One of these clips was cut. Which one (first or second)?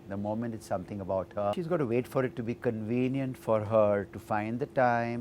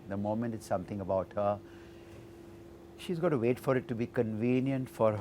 first